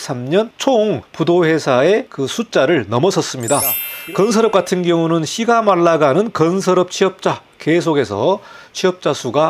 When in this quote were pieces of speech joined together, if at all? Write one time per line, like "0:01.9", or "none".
0:00.8
0:02.2
0:03.9